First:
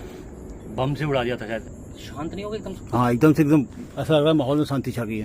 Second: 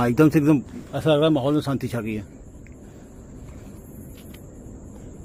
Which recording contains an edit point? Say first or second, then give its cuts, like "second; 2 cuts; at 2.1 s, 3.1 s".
first; 1 cut; at 1.6 s